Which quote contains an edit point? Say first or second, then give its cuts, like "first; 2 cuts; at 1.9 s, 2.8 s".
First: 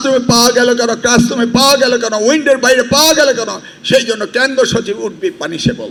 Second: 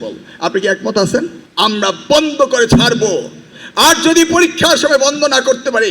second; 1 cut; at 1.4 s